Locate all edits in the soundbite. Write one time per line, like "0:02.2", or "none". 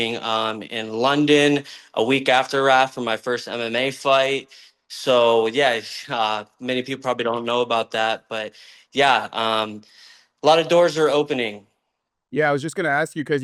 none